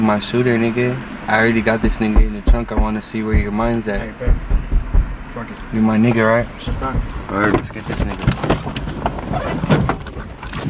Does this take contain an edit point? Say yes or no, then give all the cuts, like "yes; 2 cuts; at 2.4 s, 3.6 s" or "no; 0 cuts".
no; 0 cuts